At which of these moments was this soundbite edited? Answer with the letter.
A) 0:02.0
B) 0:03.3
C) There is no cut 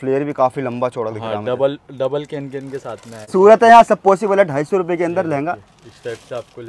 B